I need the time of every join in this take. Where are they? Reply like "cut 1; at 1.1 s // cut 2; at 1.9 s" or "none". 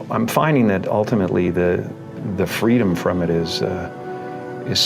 none